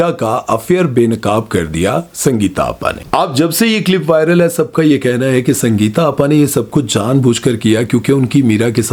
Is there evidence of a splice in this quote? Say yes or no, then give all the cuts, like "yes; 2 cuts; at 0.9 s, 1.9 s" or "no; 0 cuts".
no; 0 cuts